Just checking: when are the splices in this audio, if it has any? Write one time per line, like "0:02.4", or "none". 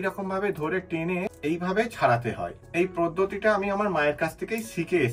0:01.3
0:02.6

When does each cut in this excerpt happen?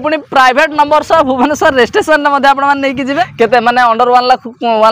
0:03.3

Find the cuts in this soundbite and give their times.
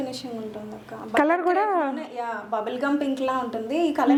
none

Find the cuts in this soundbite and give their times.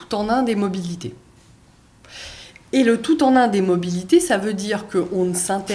none

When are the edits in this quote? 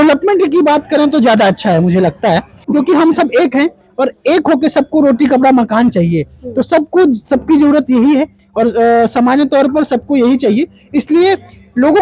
0:02.6

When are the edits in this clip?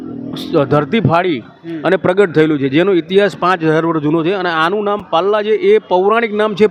none

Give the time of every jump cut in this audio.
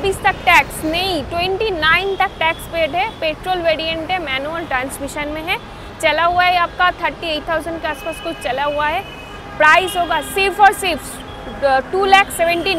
none

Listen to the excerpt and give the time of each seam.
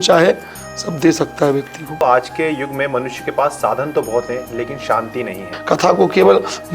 0:02.0
0:05.5

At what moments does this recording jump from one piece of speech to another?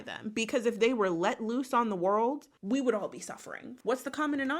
0:03.7

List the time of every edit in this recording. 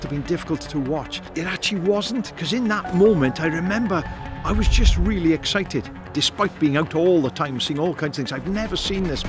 0:01.2
0:06.0

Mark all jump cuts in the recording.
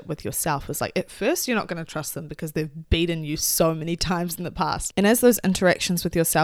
0:04.9

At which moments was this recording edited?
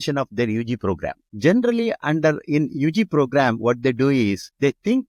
none

